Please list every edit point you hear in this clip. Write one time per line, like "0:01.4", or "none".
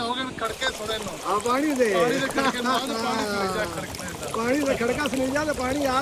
none